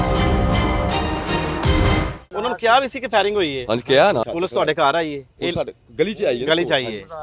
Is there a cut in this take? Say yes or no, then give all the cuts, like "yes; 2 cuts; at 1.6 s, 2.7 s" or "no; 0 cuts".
yes; 2 cuts; at 2.2 s, 4.2 s